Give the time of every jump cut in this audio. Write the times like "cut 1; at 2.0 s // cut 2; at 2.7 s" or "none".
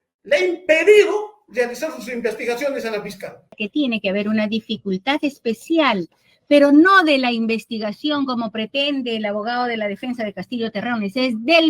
cut 1; at 3.6 s